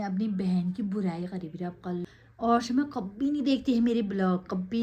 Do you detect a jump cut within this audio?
yes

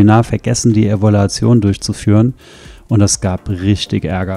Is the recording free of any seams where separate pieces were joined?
yes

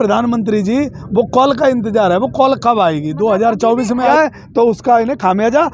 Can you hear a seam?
yes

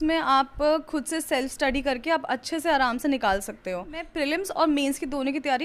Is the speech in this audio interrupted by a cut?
yes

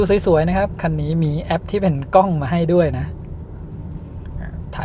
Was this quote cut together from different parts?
no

